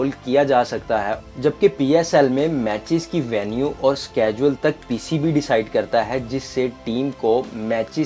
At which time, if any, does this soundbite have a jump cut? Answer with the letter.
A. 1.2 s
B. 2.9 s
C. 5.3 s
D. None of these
A